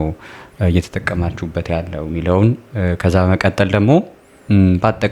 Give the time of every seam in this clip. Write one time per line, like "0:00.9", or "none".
none